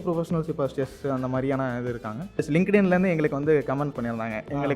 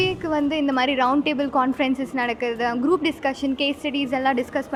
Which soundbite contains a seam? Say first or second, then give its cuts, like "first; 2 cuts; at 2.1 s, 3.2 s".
first; 1 cut; at 2.5 s